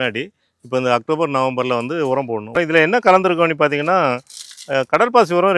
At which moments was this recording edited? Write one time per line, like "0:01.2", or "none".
0:02.5